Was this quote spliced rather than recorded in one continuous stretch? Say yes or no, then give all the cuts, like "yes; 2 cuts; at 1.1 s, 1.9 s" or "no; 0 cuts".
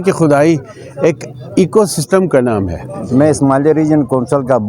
yes; 1 cut; at 3.0 s